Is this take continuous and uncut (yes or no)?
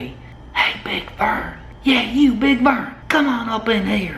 no